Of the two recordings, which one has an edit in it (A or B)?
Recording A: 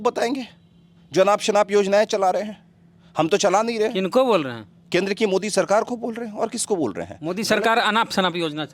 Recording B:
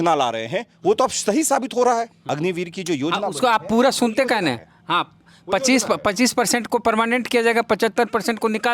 B